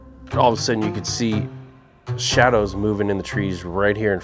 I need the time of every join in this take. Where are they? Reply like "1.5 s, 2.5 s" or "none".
none

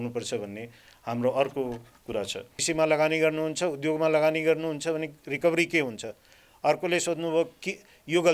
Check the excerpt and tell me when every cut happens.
2.6 s

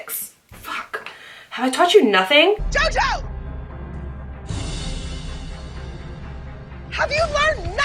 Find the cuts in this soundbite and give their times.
none

